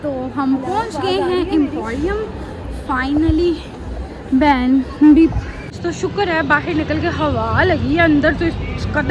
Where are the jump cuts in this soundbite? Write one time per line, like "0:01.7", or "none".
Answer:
0:05.7